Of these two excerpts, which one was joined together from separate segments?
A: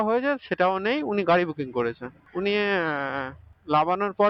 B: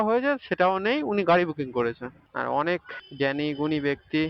B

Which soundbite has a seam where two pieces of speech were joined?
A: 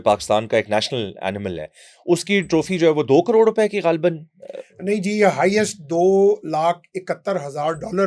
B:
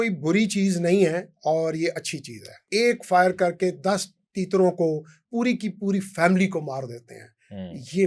B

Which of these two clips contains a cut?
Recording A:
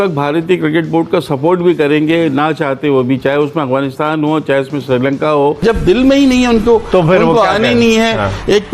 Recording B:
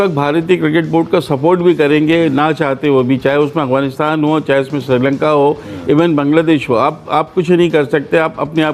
A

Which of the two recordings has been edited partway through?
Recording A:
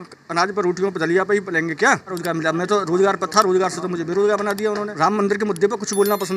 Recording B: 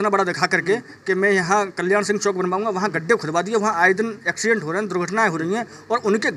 A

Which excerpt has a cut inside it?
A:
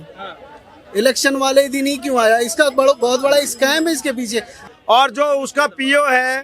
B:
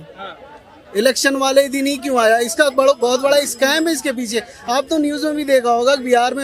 A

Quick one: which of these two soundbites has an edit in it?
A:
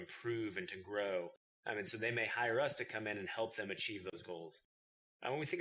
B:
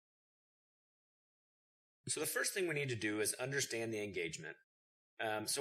A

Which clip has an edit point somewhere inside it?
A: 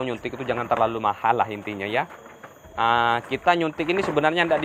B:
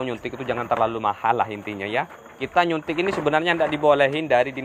B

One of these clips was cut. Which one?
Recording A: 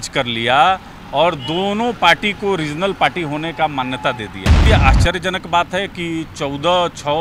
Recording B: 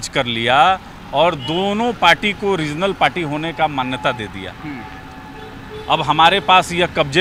A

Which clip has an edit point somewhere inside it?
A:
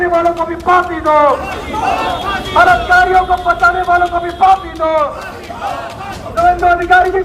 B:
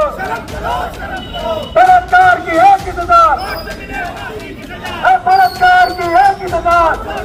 A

